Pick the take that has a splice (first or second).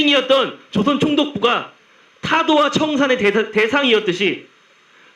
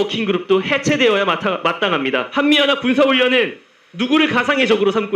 second